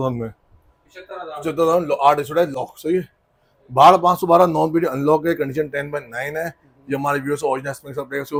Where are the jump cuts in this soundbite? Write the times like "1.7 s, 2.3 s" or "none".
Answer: none